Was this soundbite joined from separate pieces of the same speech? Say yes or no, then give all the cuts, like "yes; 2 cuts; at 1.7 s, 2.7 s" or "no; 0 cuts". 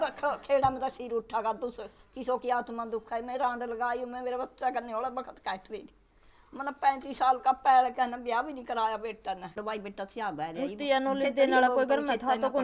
yes; 1 cut; at 9.6 s